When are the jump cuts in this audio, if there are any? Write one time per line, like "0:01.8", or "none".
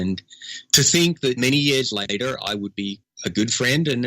0:03.1